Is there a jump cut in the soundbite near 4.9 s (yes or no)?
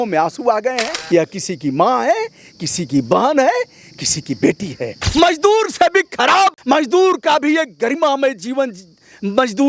yes